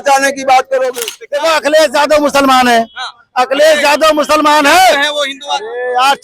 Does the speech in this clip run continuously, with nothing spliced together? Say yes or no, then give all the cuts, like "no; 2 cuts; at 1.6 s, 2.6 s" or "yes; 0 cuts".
no; 1 cut; at 1.0 s